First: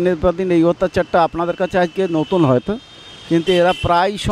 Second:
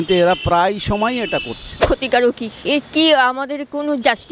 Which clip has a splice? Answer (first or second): second